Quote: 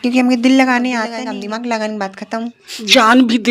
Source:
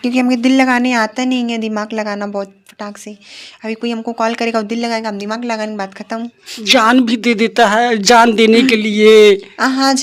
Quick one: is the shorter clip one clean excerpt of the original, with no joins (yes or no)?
no